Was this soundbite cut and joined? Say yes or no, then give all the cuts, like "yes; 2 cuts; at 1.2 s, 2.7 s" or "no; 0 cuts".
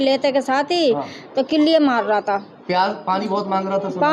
no; 0 cuts